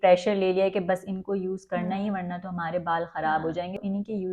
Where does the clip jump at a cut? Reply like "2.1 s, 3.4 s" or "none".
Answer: none